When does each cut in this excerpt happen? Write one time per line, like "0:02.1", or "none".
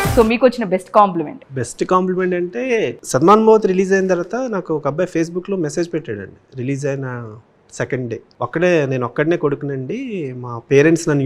0:01.4
0:03.0
0:08.3